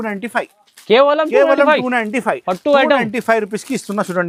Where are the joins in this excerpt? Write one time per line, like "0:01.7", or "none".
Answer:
none